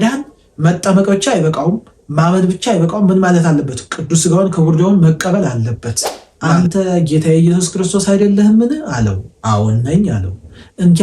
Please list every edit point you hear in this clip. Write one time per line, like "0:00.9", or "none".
0:06.3